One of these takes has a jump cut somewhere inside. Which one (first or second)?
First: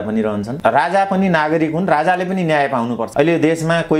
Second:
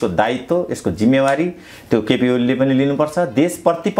first